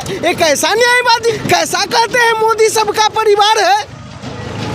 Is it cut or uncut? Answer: cut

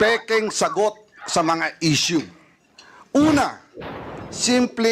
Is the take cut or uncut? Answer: cut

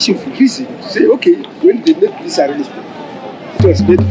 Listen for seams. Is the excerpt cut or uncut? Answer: uncut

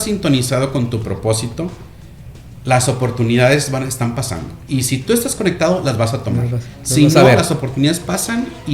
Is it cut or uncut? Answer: uncut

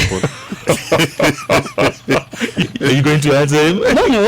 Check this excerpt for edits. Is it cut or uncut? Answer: cut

